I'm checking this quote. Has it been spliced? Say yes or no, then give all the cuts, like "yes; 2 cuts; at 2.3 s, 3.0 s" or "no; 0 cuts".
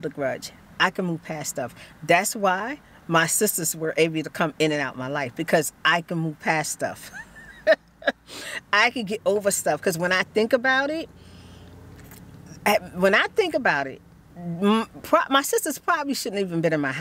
no; 0 cuts